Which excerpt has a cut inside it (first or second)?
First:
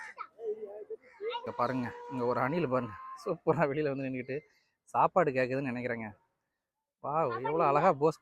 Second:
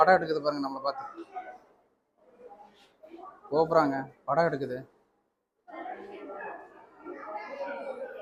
first